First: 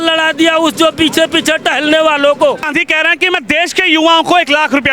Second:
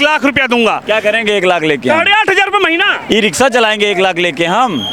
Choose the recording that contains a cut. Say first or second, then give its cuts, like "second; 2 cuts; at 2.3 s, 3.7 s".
first; 1 cut; at 2.7 s